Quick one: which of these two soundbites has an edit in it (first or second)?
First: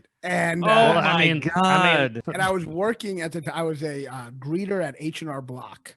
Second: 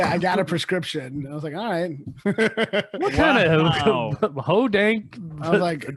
first